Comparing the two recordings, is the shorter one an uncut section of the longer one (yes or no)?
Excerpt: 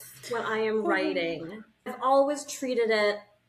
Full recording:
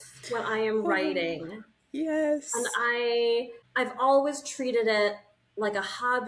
no